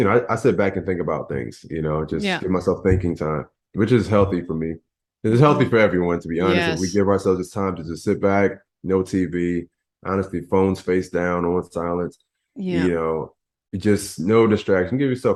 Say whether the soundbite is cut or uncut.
uncut